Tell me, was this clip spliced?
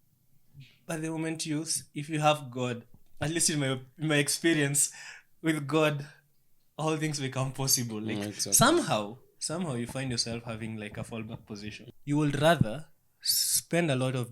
yes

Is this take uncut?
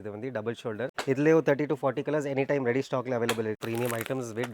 no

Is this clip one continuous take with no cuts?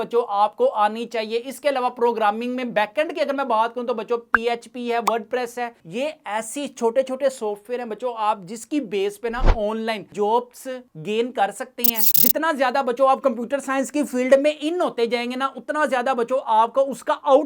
yes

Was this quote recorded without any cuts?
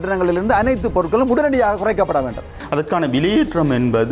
no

